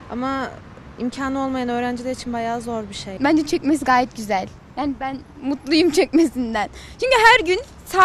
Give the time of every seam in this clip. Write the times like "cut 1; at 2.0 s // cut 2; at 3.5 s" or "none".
cut 1; at 3.2 s